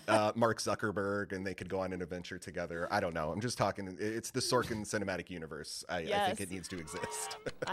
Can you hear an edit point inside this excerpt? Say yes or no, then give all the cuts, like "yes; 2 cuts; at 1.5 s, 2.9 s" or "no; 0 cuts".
no; 0 cuts